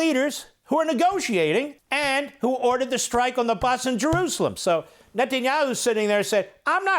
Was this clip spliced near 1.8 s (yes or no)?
yes